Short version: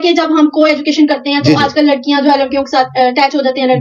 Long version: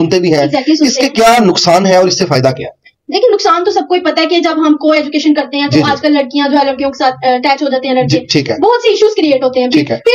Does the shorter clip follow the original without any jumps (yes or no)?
yes